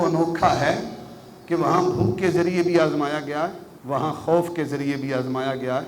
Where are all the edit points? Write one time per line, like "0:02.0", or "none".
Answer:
none

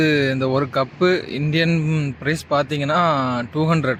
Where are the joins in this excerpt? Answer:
none

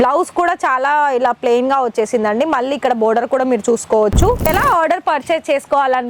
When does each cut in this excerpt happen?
0:04.5

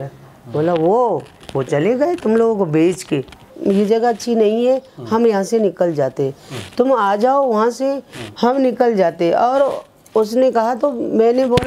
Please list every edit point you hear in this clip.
0:03.6

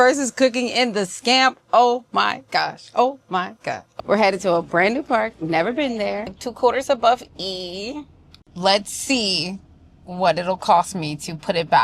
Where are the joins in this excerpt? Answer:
0:03.9
0:06.3

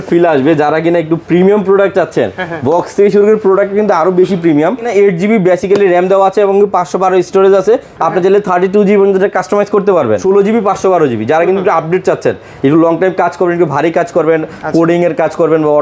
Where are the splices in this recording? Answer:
0:04.9
0:10.2

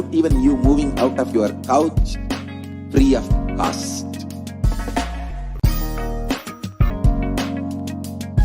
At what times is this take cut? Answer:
0:06.9

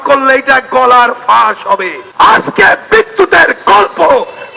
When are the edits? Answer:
0:02.0

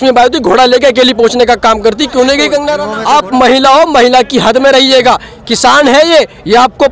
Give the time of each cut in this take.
0:02.9

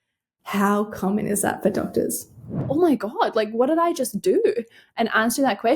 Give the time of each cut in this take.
0:02.7

